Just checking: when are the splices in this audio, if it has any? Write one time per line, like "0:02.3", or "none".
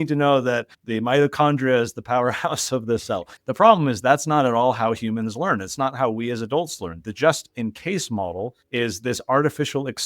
0:03.3